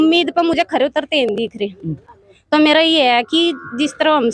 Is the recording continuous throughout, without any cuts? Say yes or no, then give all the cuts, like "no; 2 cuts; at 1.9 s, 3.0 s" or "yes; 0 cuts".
yes; 0 cuts